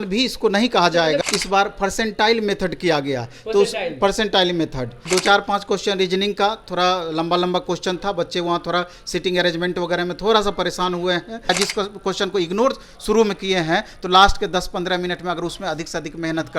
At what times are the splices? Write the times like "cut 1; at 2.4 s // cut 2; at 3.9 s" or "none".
cut 1; at 1.2 s // cut 2; at 4.9 s // cut 3; at 11.5 s